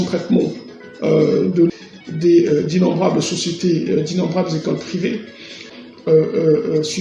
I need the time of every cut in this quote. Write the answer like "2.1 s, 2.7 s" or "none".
none